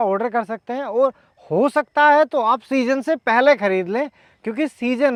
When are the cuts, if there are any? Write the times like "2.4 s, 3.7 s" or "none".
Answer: none